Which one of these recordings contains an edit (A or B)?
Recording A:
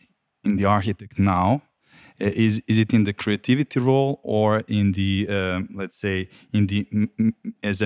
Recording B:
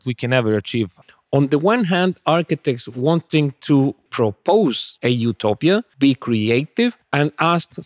B